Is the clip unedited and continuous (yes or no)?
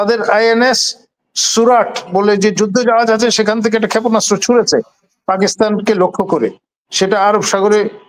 yes